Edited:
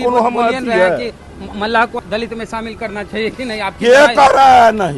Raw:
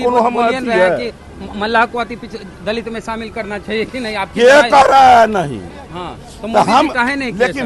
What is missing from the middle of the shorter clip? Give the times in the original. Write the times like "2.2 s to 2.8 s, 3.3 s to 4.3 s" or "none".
2.0 s to 2.5 s

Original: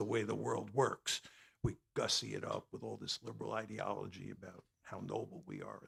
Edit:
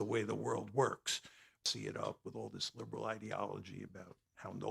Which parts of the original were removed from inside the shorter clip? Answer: 1.6 s to 2.1 s

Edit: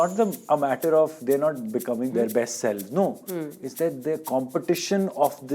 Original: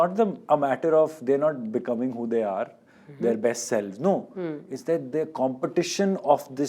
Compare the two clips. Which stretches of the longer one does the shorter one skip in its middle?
2.1 s to 3.2 s

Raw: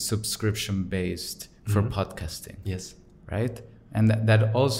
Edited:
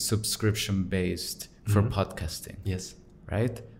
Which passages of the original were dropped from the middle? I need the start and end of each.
none

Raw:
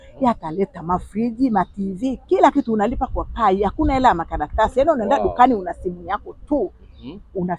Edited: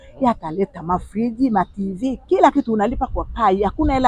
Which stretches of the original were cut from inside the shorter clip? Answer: none

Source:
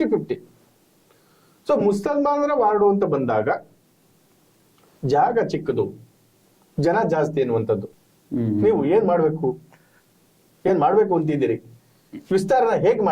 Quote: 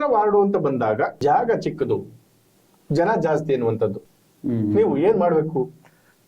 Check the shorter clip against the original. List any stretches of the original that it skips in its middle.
3.6 s to 5.0 s

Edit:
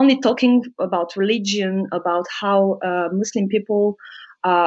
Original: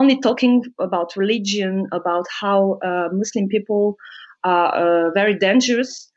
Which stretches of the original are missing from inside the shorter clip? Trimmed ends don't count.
none

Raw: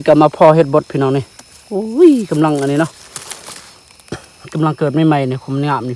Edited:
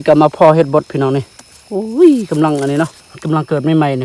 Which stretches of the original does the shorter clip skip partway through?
3.1 s to 4.4 s

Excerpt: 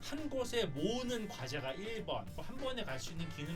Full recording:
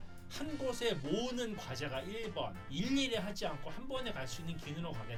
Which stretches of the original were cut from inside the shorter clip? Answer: 2.6 s to 3.6 s

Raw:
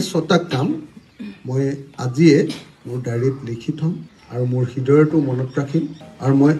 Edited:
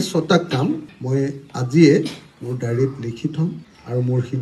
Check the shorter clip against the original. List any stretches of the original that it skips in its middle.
0.9 s to 1.4 s

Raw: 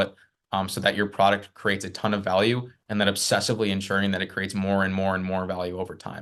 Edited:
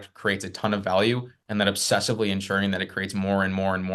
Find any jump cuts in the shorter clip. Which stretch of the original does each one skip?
none

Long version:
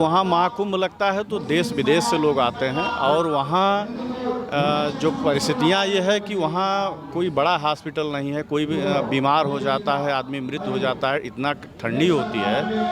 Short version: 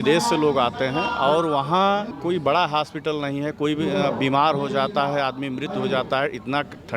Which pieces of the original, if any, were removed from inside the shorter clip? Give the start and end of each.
3.9 s to 7.0 s

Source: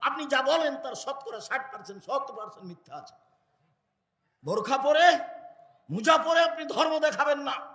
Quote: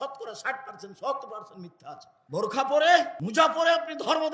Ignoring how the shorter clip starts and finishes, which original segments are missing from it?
3.2 s to 4.2 s, 5.3 s to 5.9 s

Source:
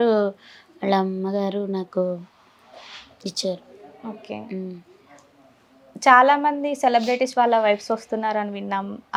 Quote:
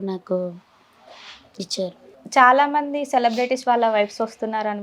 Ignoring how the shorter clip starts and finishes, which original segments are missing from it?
3.8 s to 5.8 s

